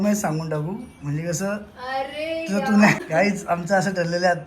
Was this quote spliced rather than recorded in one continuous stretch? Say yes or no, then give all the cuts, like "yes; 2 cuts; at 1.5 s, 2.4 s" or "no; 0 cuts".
yes; 1 cut; at 3.0 s